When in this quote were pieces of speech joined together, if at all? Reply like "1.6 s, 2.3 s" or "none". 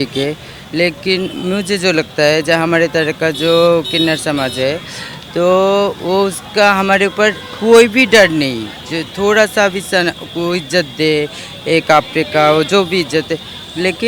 none